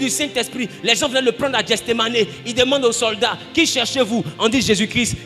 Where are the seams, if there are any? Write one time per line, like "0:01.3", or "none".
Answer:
none